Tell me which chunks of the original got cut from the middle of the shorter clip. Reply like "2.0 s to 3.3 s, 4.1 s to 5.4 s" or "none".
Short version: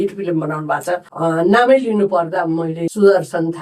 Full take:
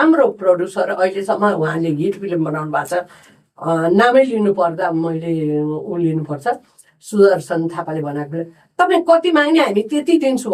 3.1 s to 3.5 s, 5.3 s to 7.0 s